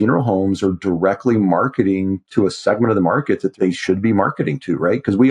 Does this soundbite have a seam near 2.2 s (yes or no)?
yes